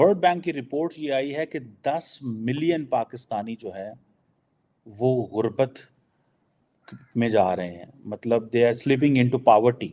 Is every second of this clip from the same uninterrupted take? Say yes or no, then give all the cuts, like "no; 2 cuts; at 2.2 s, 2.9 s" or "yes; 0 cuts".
yes; 0 cuts